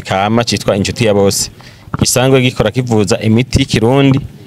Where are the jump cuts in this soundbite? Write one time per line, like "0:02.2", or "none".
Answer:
none